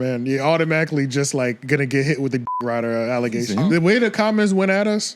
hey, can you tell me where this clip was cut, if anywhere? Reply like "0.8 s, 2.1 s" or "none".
3.5 s

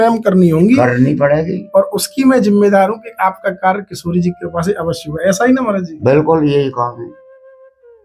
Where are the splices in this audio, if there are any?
7.1 s

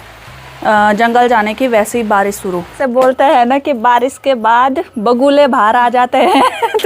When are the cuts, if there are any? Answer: 2.8 s

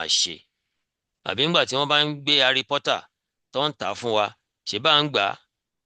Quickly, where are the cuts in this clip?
none

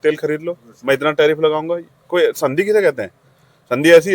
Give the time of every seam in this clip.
none

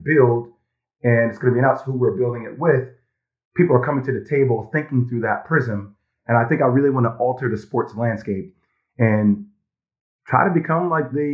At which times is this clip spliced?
none

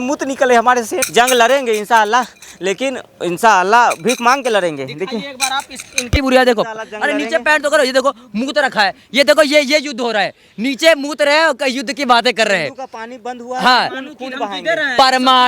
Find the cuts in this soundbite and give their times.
1.0 s, 6.1 s

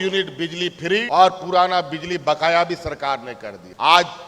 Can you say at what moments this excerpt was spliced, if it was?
none

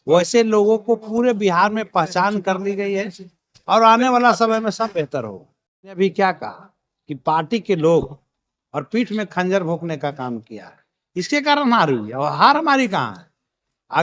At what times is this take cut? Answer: 6.0 s

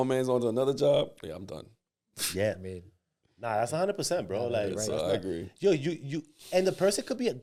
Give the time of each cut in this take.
none

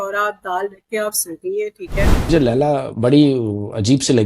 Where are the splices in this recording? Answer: 2.3 s

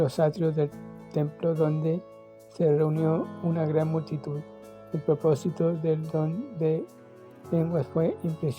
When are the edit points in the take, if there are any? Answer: none

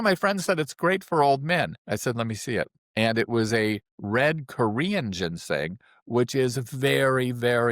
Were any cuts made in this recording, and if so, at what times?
1.8 s, 2.8 s

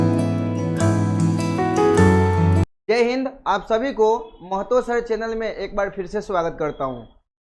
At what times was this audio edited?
2.5 s

